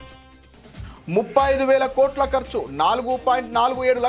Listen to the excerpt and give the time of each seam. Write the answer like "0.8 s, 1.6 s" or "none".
0.9 s